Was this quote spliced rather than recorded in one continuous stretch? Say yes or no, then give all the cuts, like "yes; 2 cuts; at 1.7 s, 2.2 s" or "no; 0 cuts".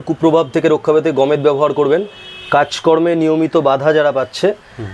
no; 0 cuts